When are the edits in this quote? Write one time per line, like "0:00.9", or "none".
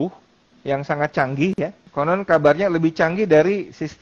0:01.8